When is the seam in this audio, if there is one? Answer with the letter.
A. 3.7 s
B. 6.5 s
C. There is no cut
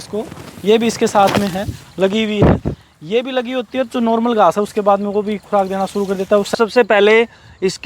B